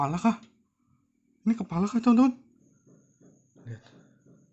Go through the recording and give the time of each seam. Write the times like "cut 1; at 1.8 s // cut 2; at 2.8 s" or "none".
cut 1; at 2.7 s